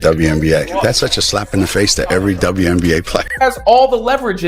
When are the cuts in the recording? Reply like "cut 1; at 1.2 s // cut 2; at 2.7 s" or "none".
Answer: cut 1; at 3.3 s